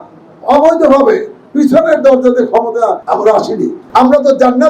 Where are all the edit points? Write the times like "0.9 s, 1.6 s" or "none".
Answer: 3.0 s, 3.8 s